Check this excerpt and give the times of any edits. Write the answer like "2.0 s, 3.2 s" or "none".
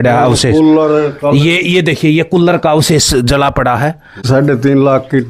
4.1 s